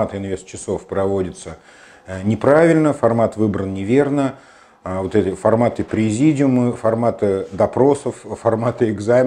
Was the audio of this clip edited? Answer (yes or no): no